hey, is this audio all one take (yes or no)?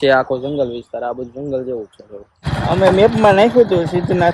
no